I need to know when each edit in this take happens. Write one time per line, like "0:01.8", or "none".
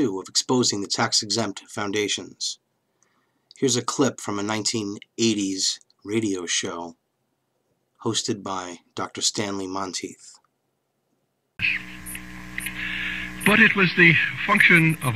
0:02.4